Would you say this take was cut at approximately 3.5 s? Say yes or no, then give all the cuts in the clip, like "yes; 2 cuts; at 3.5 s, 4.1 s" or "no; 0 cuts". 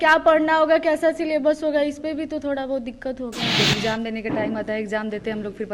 yes; 1 cut; at 3.5 s